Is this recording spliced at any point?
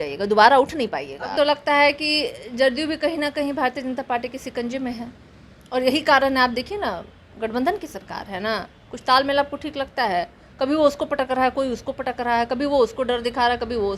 yes; 1 cut; at 1.3 s

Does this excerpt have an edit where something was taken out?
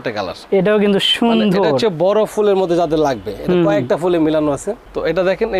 no; 0 cuts

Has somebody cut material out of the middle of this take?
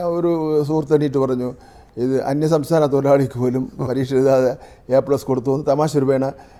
no; 0 cuts

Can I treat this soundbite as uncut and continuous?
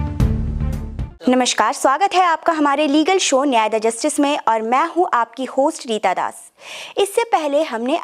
no; 1 cut; at 1.2 s

